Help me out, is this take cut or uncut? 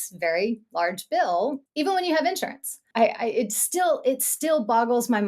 cut